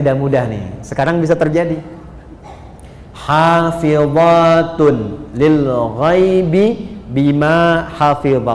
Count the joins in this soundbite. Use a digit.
0